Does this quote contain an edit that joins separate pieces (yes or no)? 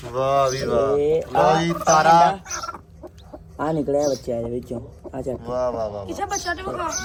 no